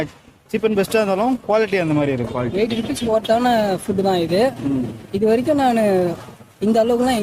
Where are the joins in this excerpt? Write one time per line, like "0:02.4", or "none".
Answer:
0:02.4